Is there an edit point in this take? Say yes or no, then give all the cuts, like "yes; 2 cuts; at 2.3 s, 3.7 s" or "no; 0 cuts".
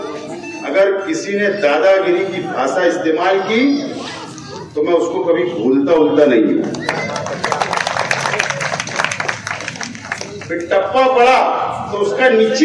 no; 0 cuts